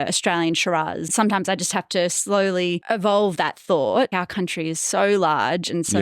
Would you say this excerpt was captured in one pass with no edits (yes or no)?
no